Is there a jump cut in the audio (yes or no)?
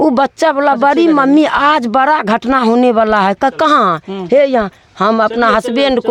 no